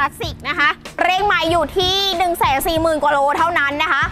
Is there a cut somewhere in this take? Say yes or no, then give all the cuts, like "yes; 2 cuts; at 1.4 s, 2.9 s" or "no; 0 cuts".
yes; 1 cut; at 1.0 s